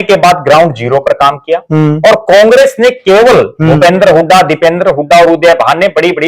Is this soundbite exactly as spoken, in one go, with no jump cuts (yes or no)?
yes